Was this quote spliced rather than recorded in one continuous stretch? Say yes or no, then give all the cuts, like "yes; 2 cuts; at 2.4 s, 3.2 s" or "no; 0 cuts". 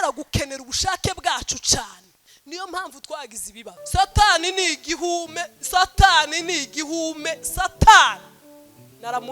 yes; 1 cut; at 3.6 s